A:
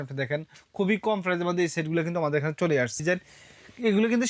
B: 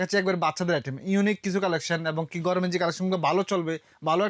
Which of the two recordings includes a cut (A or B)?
A